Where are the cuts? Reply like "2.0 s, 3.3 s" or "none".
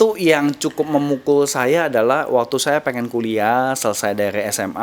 none